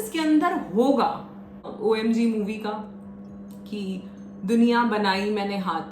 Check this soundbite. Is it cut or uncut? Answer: cut